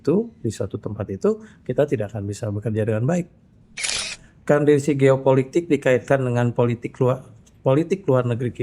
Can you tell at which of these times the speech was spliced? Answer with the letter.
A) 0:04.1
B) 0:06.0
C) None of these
A